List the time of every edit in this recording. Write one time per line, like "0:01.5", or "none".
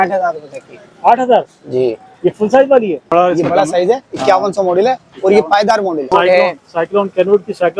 0:03.0
0:06.1